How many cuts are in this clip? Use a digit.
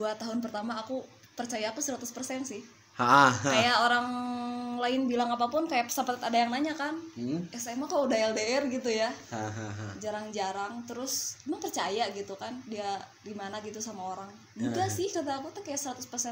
0